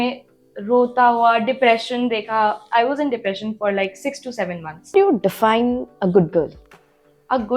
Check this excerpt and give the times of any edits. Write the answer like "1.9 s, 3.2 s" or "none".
4.9 s